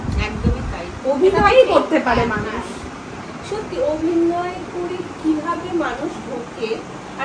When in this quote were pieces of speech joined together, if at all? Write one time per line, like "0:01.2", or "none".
none